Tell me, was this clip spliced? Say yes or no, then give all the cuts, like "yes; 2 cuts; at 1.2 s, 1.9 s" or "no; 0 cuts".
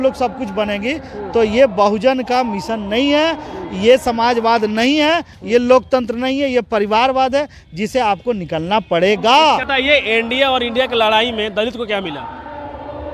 yes; 1 cut; at 9.7 s